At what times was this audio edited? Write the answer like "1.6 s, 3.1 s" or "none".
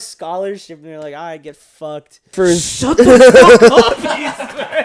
2.3 s